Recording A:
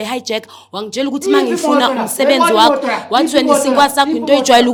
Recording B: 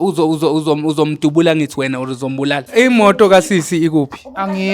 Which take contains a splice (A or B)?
B